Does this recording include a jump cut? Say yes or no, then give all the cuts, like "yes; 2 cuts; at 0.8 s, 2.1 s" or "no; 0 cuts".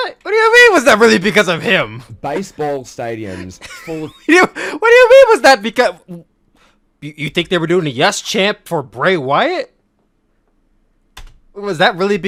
no; 0 cuts